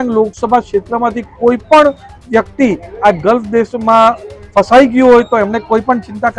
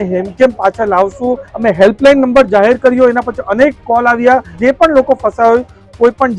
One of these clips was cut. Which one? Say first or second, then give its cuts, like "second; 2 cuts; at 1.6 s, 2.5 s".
second; 2 cuts; at 1.5 s, 4.5 s